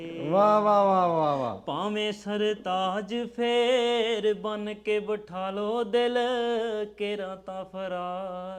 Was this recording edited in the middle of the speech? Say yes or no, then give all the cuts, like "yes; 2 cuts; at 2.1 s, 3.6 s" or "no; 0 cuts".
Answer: no; 0 cuts